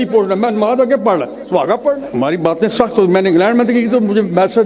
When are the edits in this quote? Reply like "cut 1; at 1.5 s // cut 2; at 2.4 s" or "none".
cut 1; at 2.1 s